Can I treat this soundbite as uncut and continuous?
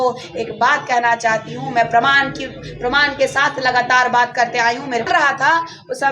no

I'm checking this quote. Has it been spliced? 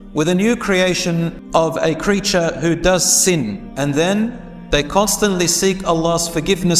yes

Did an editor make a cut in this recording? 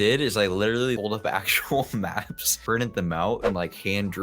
yes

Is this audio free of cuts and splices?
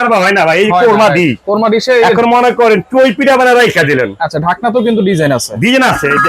yes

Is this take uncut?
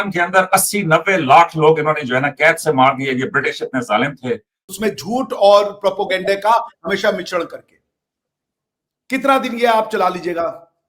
no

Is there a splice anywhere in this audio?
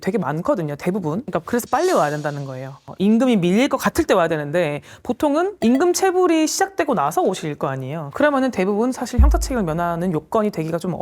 no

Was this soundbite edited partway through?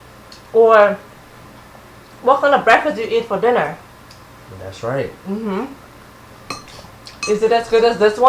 yes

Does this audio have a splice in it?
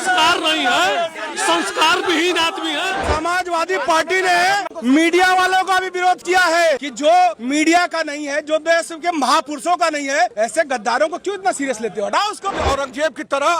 yes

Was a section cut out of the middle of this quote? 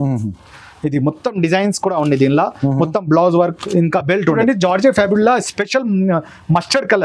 yes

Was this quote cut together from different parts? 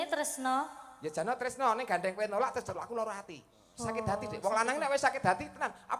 no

